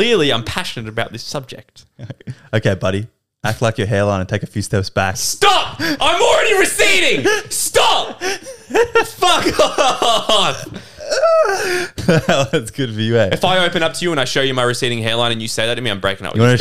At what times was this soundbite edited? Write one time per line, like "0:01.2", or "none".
none